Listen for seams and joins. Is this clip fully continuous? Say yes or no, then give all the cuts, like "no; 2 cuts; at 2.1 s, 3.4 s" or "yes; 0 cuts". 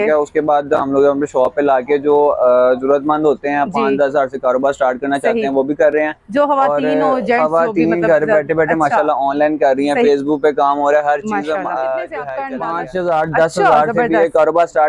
no; 1 cut; at 12.4 s